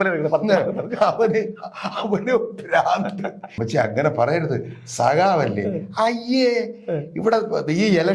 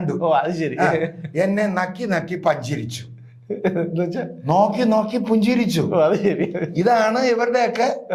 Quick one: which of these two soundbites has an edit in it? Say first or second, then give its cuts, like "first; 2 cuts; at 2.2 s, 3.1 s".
first; 1 cut; at 3.5 s